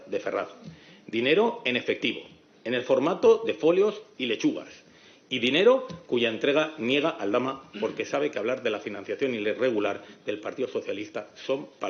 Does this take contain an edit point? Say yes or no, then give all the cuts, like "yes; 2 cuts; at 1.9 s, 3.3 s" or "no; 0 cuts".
no; 0 cuts